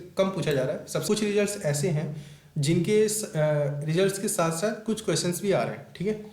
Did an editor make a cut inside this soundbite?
yes; 1 cut; at 1.0 s

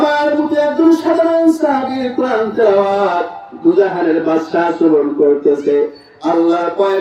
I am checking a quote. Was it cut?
no; 0 cuts

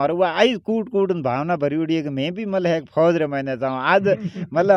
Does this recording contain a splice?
no; 0 cuts

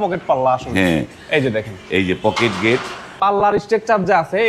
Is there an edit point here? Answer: yes; 1 cut; at 3.2 s

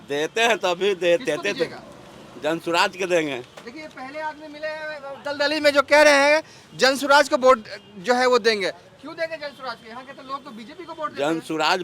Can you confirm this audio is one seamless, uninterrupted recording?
yes; 0 cuts

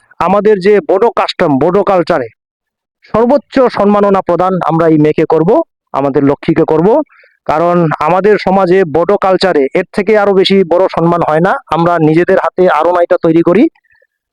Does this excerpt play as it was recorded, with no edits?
yes; 0 cuts

